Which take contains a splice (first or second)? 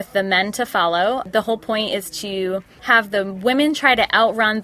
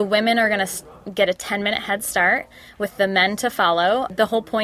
first